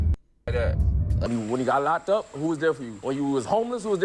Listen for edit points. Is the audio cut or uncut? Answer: cut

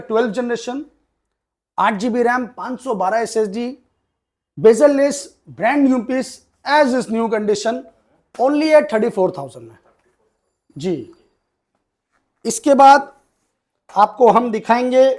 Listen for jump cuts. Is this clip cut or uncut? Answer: uncut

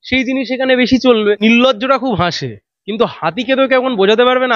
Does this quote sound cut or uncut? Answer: cut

